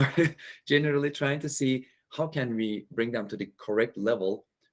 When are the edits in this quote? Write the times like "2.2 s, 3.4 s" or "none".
none